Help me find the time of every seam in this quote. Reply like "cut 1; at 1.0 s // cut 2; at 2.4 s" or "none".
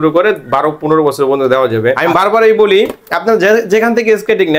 cut 1; at 2.0 s